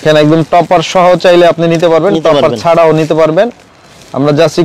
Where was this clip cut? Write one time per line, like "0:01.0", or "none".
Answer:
none